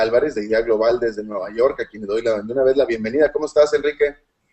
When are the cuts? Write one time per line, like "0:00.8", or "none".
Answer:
0:03.5